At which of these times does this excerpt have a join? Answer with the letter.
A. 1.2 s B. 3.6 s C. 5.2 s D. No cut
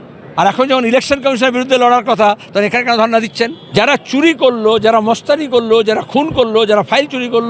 B